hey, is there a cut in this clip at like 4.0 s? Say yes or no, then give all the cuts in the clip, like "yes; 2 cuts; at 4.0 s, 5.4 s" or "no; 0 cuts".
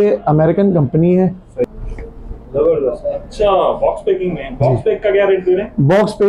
no; 1 cut; at 1.6 s